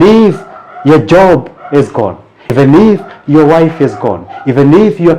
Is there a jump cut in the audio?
yes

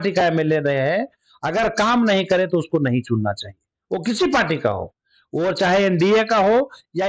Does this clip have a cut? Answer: no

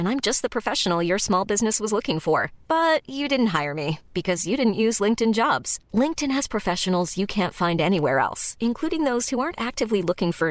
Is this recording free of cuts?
yes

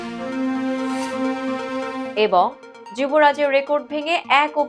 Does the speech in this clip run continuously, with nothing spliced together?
yes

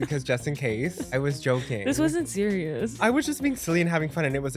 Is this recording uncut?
no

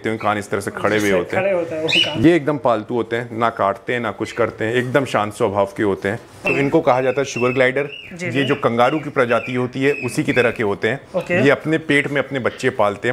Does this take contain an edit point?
yes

